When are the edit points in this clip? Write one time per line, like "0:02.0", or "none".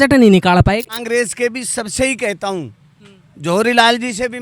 0:00.9